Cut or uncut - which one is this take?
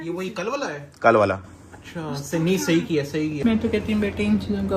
cut